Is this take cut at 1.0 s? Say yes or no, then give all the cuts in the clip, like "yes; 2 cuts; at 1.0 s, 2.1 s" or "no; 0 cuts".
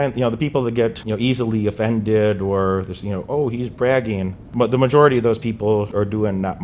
yes; 3 cuts; at 1.0 s, 4.5 s, 5.9 s